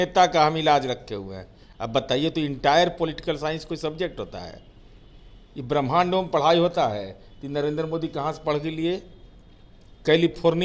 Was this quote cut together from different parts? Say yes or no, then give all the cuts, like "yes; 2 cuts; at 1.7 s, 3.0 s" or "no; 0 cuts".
no; 0 cuts